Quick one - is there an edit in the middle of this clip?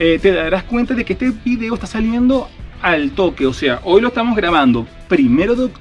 no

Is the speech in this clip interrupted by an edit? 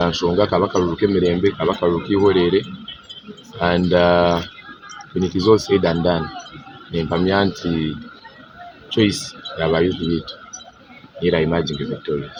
no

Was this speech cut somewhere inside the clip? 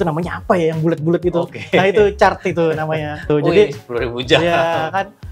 yes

